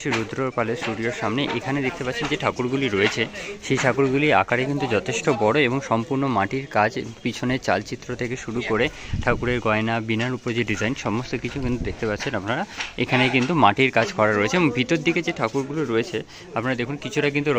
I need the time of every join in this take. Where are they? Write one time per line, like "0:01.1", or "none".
none